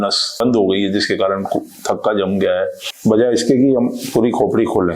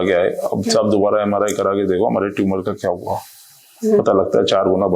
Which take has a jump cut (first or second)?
first